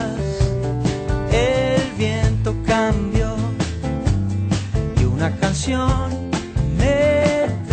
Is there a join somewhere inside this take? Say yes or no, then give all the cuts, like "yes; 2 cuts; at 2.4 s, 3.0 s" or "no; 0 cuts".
no; 0 cuts